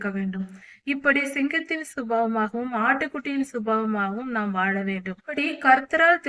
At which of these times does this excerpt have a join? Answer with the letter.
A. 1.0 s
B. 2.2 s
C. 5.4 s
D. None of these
C